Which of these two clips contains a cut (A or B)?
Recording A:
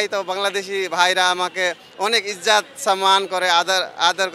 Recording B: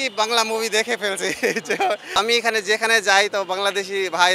B